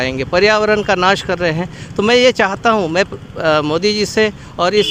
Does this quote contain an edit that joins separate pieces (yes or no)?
no